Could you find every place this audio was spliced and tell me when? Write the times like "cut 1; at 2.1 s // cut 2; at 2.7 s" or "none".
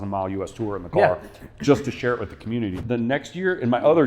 cut 1; at 2.8 s